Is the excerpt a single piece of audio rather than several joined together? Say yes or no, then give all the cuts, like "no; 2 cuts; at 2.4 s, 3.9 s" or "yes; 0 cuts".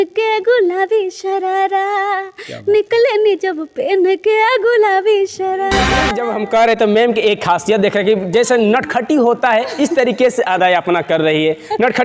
no; 1 cut; at 6.2 s